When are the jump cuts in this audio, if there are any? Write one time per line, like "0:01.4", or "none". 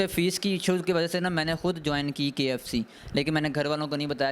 none